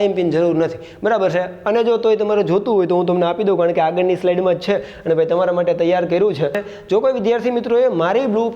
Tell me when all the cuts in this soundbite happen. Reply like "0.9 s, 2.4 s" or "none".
6.6 s

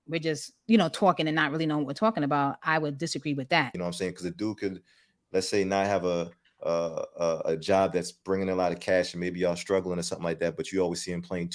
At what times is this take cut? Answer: 3.7 s

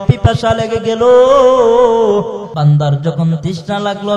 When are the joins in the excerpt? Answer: 2.5 s

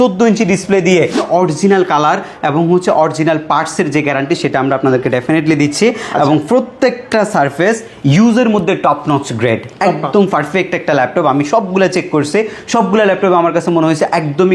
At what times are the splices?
1.2 s

